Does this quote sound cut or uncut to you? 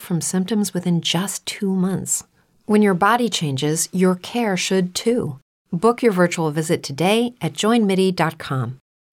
cut